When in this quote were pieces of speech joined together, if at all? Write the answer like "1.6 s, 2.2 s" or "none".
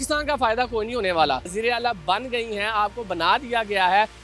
1.5 s